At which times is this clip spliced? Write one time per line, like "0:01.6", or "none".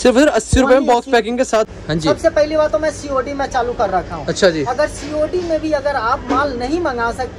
0:01.7